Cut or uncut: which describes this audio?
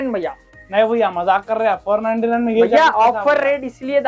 uncut